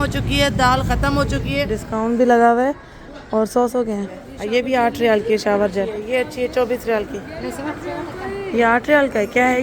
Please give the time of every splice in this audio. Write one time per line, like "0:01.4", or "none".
0:01.7
0:04.3
0:06.1